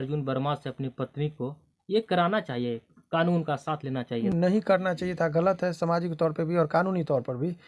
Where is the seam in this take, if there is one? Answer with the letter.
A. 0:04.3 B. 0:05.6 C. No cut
A